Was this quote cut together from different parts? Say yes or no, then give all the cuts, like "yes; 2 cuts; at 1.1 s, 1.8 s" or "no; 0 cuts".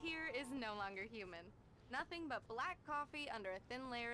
no; 0 cuts